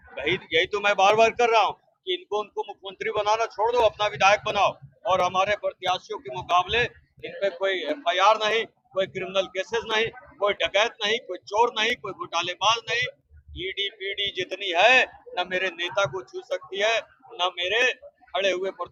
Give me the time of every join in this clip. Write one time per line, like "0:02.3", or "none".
none